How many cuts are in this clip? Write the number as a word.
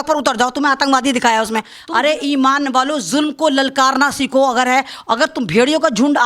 one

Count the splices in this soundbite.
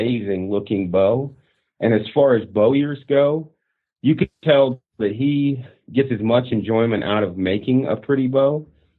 zero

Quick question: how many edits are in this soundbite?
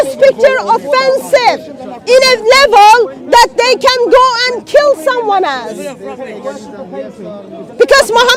zero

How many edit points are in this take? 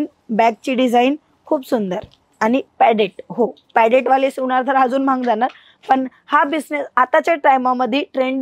zero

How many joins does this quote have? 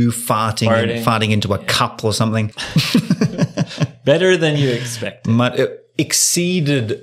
one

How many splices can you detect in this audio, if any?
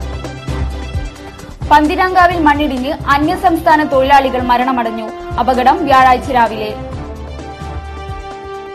one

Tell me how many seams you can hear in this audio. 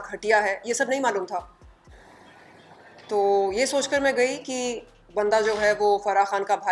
zero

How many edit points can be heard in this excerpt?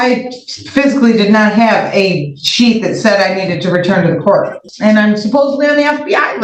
one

